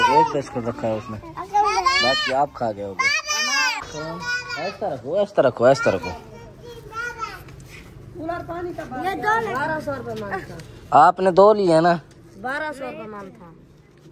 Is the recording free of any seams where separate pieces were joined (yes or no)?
no